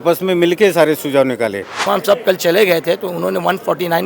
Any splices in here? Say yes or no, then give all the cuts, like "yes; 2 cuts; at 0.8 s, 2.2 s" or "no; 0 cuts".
yes; 1 cut; at 1.8 s